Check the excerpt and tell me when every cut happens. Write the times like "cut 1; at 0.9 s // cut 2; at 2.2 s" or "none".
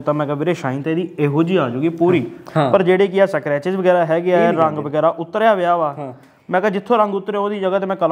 none